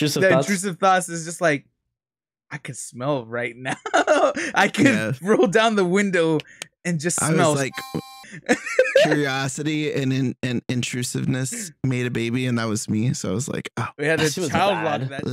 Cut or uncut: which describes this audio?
uncut